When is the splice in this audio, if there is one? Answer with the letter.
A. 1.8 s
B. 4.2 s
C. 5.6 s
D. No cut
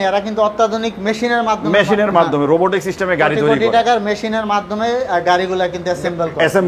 D